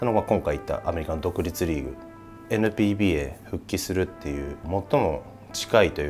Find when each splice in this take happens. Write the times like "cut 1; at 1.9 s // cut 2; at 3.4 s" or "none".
cut 1; at 2.4 s // cut 2; at 4.6 s